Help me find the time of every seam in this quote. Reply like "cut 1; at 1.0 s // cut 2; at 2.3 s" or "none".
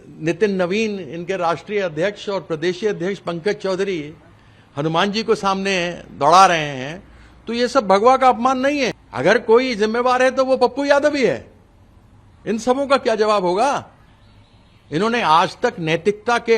cut 1; at 9.0 s